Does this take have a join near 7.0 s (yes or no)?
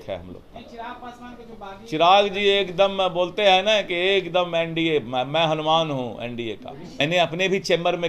yes